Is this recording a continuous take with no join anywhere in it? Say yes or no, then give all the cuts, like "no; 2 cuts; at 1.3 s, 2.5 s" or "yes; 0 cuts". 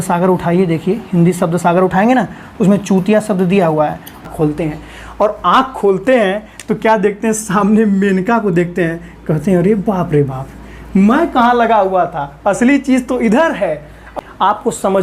no; 2 cuts; at 4.2 s, 14.1 s